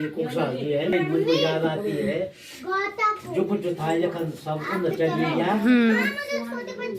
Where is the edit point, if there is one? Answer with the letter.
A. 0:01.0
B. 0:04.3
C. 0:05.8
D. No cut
A